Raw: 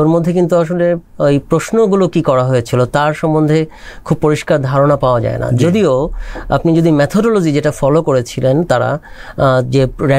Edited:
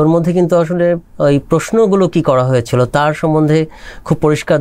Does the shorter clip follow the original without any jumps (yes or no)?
yes